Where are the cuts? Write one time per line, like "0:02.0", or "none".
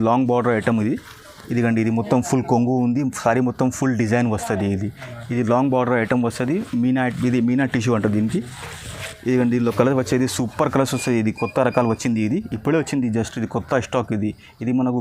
none